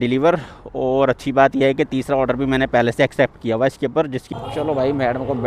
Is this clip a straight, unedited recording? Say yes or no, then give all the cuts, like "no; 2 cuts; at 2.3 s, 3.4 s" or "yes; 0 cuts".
no; 1 cut; at 4.2 s